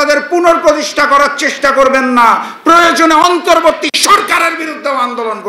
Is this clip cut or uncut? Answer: uncut